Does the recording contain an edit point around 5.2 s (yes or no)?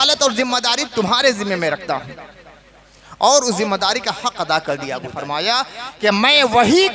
yes